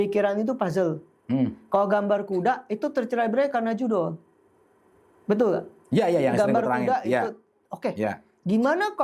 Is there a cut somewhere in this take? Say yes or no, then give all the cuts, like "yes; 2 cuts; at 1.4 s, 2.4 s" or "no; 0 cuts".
no; 0 cuts